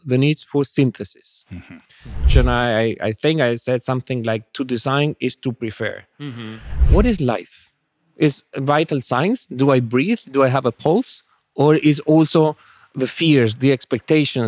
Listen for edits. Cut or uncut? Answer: cut